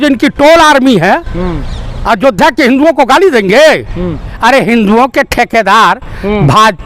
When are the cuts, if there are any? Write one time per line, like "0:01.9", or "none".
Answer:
0:04.3